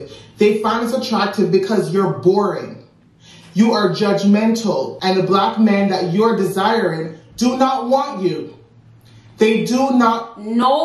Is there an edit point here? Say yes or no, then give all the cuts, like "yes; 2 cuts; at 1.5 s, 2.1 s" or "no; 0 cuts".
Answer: yes; 1 cut; at 4.9 s